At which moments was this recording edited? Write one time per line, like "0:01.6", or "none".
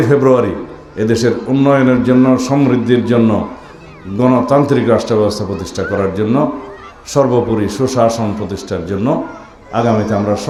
none